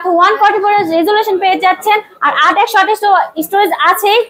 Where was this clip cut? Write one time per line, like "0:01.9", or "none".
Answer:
none